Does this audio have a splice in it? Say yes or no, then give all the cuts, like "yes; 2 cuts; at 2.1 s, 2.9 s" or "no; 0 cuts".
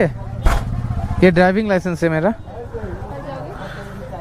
yes; 1 cut; at 3.1 s